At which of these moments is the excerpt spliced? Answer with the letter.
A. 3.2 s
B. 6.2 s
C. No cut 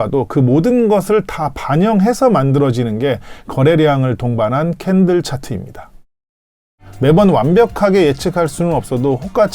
B